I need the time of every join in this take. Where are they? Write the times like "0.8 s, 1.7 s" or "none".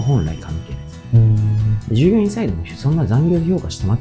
1.9 s